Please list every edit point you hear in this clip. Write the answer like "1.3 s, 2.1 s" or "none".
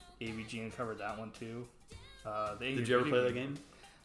none